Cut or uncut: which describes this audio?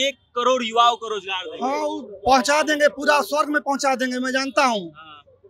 uncut